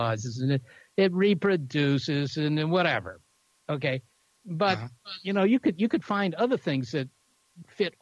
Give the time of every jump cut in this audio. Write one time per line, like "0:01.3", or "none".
none